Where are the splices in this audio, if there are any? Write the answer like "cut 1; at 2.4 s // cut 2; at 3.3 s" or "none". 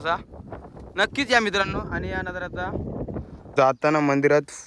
cut 1; at 3.4 s